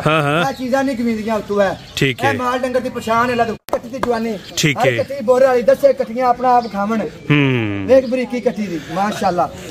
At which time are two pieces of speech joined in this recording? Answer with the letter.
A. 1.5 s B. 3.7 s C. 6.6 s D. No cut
B